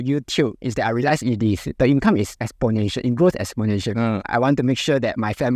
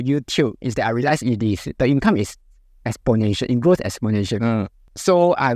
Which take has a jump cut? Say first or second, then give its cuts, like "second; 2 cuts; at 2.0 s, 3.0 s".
first; 2 cuts; at 2.4 s, 4.2 s